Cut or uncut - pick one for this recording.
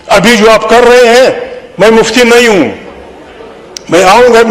uncut